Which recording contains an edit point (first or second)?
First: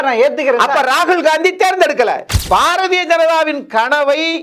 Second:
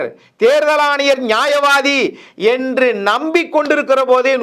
first